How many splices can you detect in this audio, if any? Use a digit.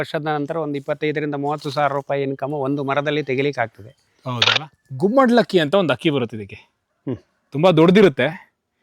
1